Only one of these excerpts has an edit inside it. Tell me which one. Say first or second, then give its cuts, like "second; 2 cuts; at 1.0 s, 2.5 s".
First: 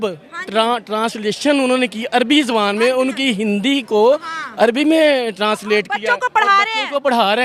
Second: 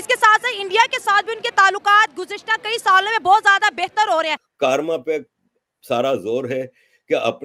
second; 1 cut; at 4.4 s